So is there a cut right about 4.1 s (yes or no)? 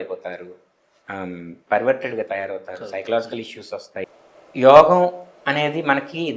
yes